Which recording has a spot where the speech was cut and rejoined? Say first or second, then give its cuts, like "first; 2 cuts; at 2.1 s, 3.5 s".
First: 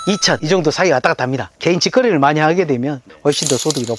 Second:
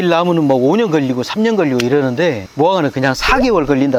first; 1 cut; at 1.6 s